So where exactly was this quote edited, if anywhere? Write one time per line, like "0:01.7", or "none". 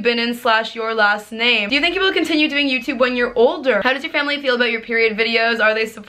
0:01.6
0:03.8